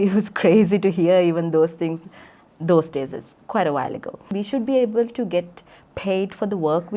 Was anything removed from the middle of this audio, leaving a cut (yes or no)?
yes